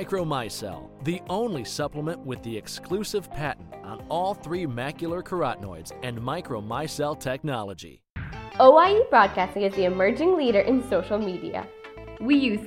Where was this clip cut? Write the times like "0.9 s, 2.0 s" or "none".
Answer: 8.2 s